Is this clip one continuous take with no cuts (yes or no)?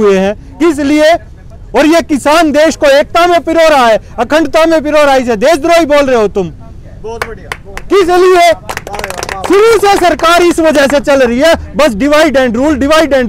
yes